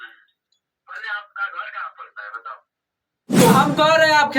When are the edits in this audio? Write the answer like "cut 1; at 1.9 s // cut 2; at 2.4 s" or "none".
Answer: cut 1; at 3.4 s